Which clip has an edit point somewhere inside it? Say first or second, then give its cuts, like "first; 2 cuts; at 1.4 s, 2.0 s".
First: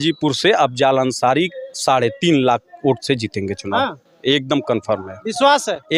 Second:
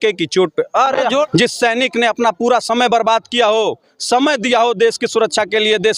second; 1 cut; at 1.2 s